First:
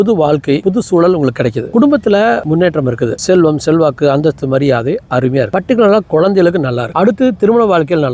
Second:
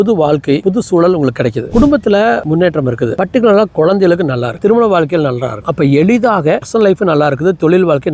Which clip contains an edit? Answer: second; 4 cuts; at 3.2 s, 4.6 s, 5.6 s, 6.6 s

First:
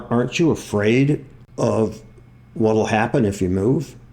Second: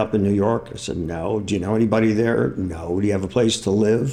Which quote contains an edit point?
first; 1 cut; at 1.4 s

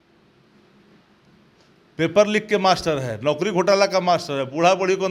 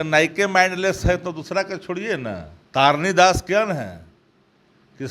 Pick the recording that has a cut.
second; 1 cut; at 2.5 s

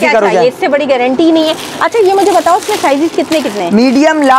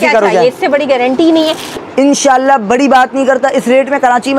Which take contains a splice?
second; 1 cut; at 1.8 s

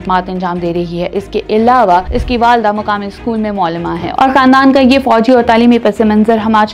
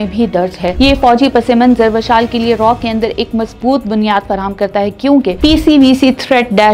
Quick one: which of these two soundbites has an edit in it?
second; 1 cut; at 5.4 s

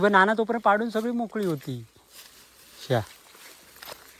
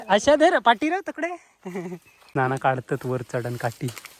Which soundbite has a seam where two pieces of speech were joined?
second; 1 cut; at 2.2 s

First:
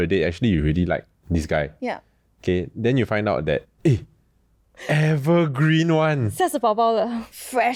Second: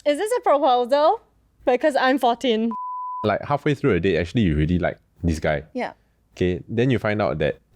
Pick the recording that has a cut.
second; 1 cut; at 3.0 s

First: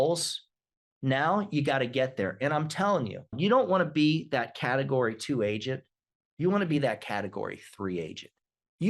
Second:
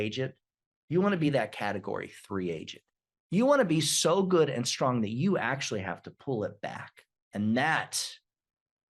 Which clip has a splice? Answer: first; 1 cut; at 3.4 s

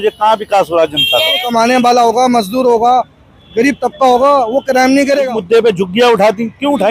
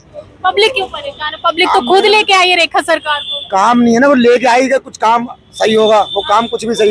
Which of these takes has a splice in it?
first; 2 cuts; at 1.4 s, 5.3 s

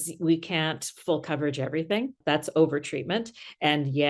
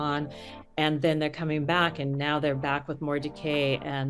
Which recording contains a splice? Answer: first; 1 cut; at 2.2 s

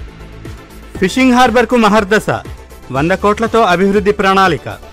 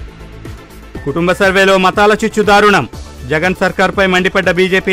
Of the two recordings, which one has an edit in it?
second; 1 cut; at 1.0 s

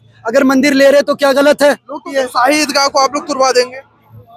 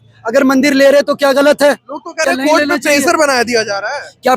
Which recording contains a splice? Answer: first; 1 cut; at 2.1 s

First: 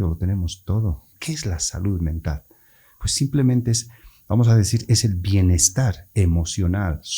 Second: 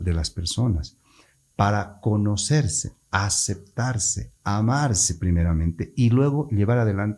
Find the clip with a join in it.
first; 1 cut; at 1.2 s

